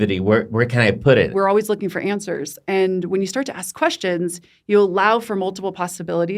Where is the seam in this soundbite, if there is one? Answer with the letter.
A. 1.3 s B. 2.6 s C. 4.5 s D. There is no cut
A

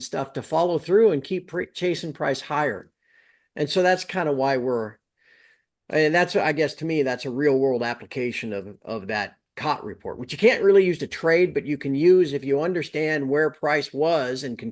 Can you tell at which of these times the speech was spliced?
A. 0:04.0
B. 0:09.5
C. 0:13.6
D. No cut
D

